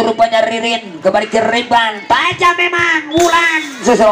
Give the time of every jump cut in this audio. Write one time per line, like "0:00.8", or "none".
none